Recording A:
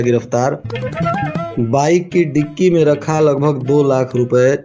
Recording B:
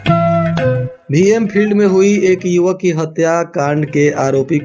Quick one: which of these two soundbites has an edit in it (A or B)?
B